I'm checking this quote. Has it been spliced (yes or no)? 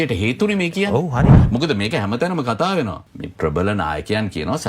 yes